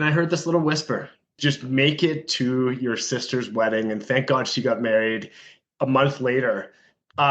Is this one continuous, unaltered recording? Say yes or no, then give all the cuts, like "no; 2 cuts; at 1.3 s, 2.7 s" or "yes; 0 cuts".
no; 1 cut; at 1.4 s